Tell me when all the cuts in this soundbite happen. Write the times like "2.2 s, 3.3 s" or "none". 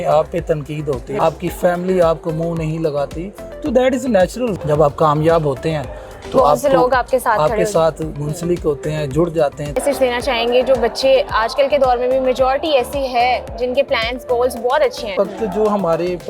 1.1 s, 4.6 s, 9.8 s, 15.1 s